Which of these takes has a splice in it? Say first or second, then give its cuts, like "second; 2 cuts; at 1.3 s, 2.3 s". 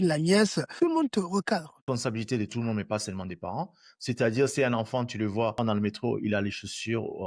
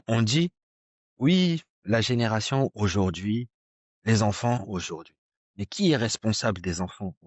first; 2 cuts; at 1.9 s, 5.5 s